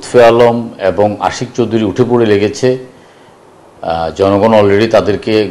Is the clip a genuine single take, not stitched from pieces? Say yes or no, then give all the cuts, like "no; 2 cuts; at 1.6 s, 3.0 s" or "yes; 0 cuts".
yes; 0 cuts